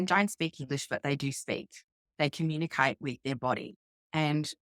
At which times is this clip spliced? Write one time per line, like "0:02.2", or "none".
none